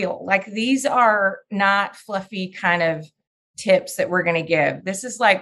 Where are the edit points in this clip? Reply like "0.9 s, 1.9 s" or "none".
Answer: none